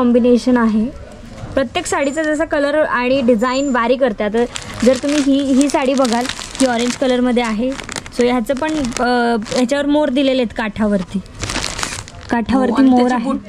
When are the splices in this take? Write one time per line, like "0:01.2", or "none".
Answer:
none